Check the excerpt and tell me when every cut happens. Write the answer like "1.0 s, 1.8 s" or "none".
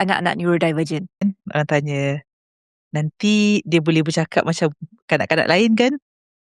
1.2 s